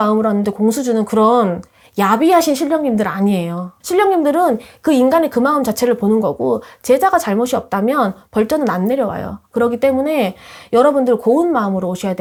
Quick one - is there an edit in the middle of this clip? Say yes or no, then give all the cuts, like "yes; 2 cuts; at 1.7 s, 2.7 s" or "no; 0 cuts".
no; 0 cuts